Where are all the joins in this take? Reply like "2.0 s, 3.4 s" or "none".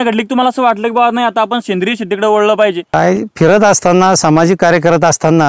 2.9 s